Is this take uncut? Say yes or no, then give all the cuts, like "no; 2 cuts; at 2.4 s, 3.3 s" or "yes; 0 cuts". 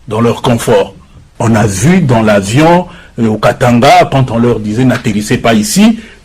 no; 1 cut; at 1.3 s